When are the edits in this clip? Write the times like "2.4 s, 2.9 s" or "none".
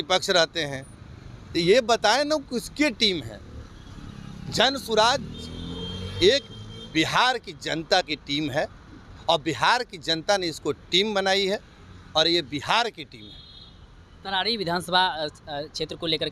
none